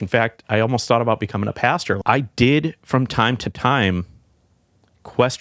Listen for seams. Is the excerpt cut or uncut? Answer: cut